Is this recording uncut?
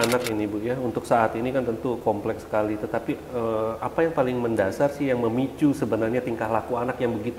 yes; 0 cuts

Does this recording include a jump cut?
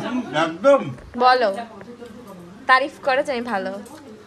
no; 0 cuts

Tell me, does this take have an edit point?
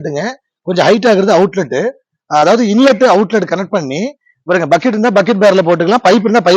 no; 0 cuts

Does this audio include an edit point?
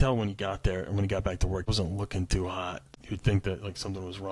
yes; 2 cuts; at 1.7 s, 3.0 s

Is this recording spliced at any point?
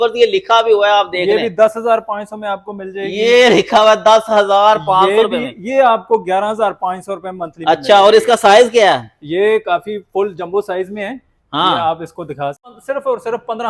yes; 1 cut; at 12.7 s

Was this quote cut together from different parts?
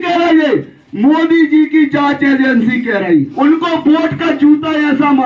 yes; 1 cut; at 3.3 s

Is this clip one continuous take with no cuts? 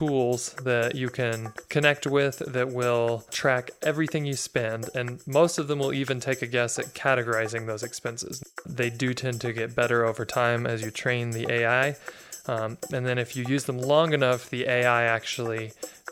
no; 3 cuts; at 1.5 s, 3.3 s, 8.6 s

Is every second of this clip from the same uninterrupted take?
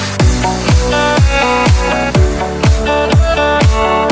yes; 0 cuts

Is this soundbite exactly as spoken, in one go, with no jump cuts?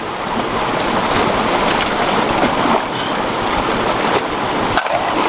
yes; 0 cuts

